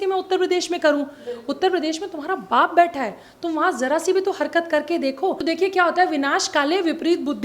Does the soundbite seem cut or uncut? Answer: cut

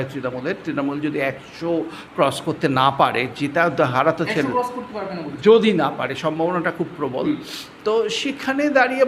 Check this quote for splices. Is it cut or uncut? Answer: uncut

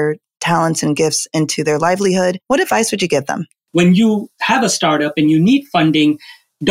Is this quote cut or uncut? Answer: cut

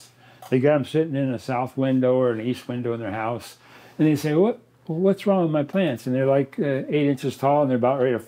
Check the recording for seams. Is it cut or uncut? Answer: uncut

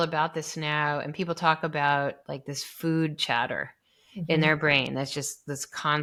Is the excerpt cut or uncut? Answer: uncut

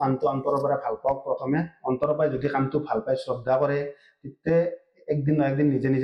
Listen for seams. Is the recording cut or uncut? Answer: uncut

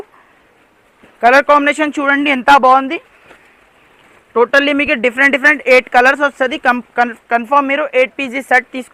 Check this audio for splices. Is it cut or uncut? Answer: uncut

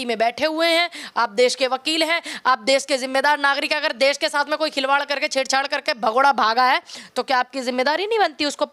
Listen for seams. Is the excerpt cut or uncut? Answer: uncut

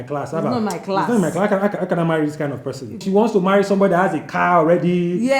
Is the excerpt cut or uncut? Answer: cut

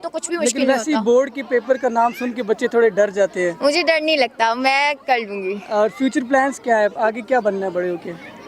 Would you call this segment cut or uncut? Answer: uncut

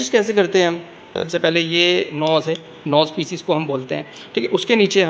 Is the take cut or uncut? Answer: cut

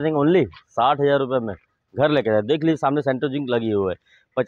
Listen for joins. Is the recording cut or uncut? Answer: uncut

